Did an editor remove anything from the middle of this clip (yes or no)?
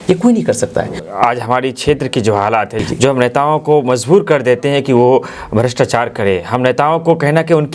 yes